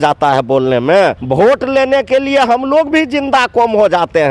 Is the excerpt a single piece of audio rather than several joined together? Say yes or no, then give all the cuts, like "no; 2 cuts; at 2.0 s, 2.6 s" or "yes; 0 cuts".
no; 1 cut; at 1.2 s